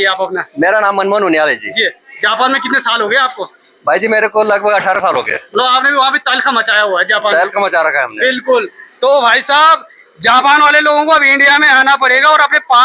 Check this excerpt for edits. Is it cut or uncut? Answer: uncut